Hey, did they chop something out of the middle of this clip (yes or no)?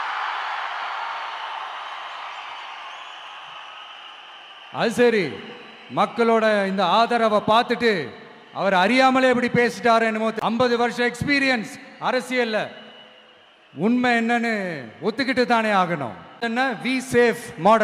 yes